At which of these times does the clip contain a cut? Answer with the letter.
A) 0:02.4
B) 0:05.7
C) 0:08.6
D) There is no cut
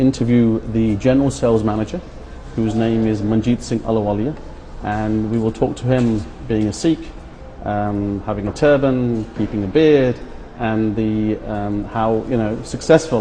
C